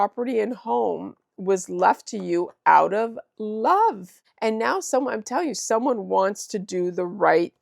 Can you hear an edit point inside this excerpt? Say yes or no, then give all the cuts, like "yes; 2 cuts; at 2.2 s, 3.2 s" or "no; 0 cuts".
yes; 1 cut; at 4.3 s